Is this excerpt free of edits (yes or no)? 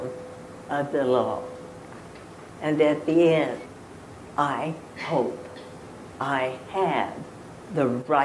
no